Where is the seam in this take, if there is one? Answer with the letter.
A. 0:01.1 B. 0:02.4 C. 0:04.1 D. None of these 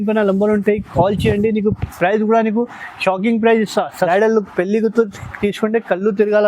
C